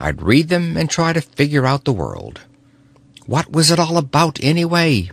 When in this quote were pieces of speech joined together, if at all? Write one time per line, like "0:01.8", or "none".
0:03.1